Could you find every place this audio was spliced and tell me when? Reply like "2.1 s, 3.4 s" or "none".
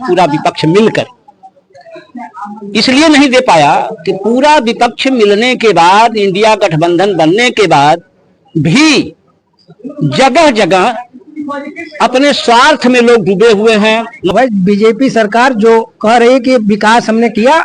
14.3 s